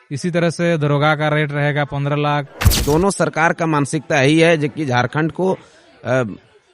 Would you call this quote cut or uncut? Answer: cut